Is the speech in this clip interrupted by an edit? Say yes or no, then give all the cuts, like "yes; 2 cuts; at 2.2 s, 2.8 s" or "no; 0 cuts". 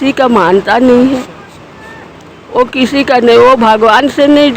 no; 0 cuts